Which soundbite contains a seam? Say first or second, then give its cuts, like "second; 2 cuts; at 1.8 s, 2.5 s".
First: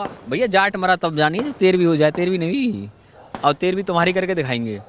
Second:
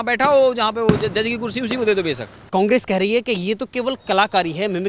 second; 1 cut; at 2.5 s